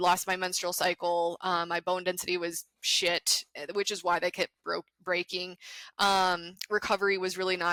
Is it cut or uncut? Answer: uncut